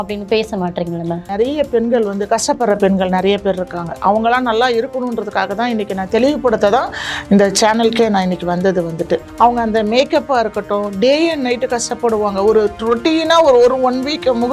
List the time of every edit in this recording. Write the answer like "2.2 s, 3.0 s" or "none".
1.2 s, 9.3 s